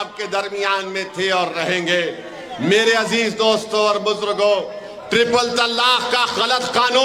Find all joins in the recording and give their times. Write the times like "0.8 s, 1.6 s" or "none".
none

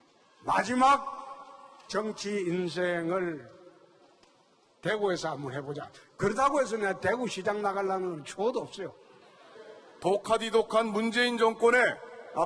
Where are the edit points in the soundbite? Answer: 10.5 s

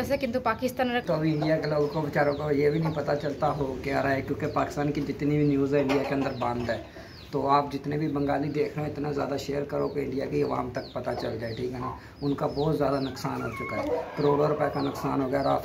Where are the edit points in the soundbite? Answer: 1.0 s

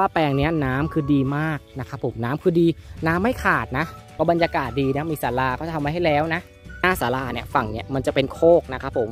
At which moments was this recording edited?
4.0 s, 6.6 s

